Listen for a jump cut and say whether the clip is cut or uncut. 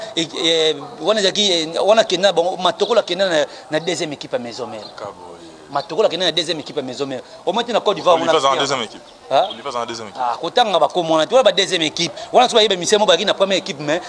uncut